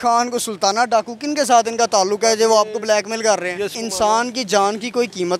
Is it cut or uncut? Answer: cut